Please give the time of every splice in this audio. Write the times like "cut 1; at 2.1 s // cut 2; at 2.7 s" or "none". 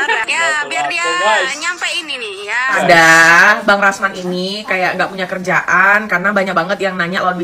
cut 1; at 2.8 s